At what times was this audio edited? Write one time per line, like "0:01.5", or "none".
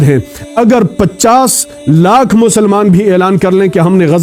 none

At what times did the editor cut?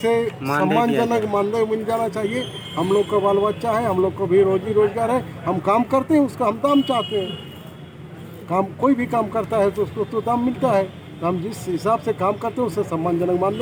none

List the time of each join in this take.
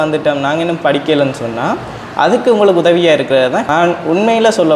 0:03.6

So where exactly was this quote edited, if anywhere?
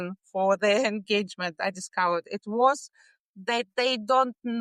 none

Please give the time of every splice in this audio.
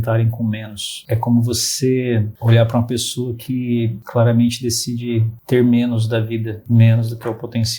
0:01.0
0:02.3
0:04.0
0:05.3
0:06.6

